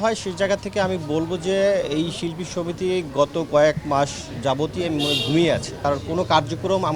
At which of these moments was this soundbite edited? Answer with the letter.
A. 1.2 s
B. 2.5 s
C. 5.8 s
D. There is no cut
C